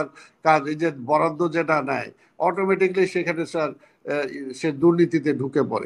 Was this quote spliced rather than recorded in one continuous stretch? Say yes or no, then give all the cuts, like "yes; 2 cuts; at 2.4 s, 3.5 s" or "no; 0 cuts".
no; 0 cuts